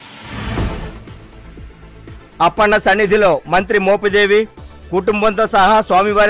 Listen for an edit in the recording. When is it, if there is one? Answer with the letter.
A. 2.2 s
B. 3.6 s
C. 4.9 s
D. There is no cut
A